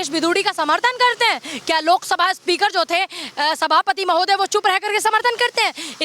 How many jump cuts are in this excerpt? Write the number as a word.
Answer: zero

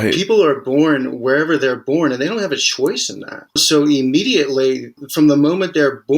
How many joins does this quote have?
two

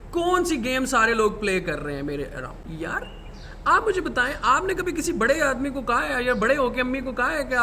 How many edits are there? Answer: one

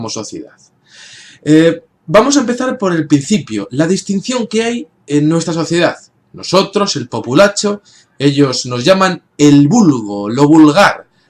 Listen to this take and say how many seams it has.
zero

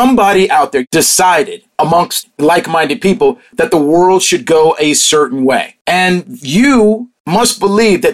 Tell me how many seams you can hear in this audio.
four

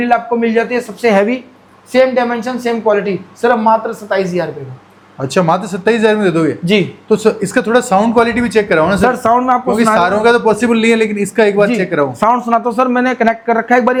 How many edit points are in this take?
zero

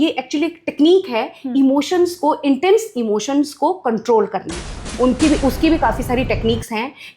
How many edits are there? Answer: one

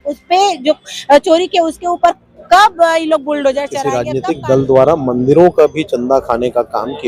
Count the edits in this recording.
one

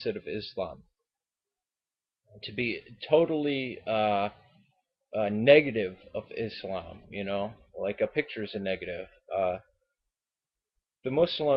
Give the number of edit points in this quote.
zero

